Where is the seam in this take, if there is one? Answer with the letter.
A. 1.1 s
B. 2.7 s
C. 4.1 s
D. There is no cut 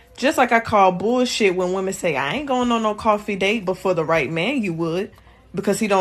C